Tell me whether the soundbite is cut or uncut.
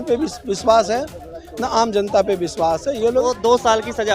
cut